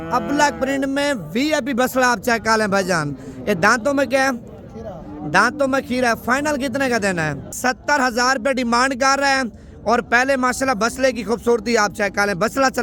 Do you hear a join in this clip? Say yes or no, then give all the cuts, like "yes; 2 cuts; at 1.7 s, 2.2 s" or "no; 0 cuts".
yes; 1 cut; at 7.5 s